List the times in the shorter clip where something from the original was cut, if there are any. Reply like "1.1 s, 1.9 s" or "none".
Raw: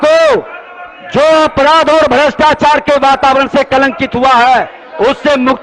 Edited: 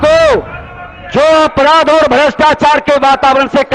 none